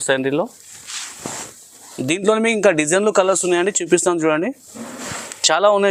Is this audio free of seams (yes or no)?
yes